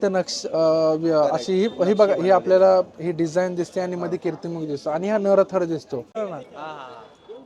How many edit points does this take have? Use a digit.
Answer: 1